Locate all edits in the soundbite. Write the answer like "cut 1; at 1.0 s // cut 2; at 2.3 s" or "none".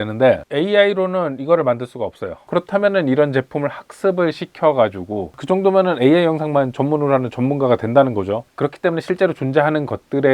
cut 1; at 2.4 s // cut 2; at 5.3 s // cut 3; at 8.5 s